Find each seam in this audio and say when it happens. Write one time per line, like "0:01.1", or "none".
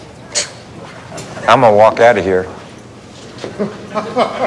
0:01.1